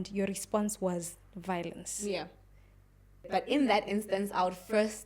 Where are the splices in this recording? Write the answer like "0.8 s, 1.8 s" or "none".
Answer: 3.3 s

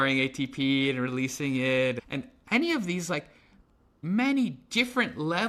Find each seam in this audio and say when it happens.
none

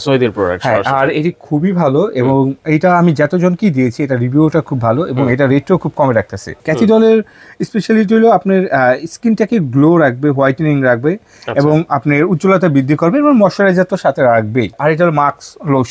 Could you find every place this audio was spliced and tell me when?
6.5 s, 14.8 s

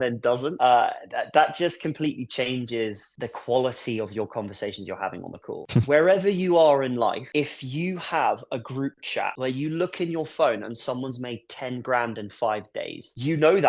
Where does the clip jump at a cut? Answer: 5.6 s

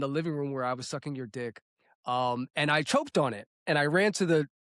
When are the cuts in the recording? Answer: none

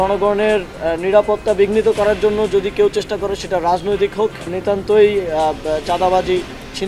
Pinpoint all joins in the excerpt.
4.5 s

